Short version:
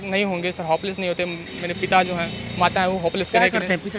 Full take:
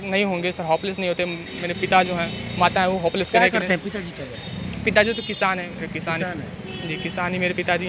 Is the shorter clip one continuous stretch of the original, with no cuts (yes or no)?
yes